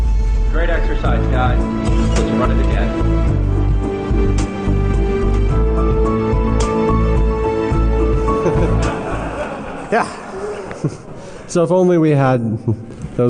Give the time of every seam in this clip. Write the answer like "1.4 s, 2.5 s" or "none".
11.1 s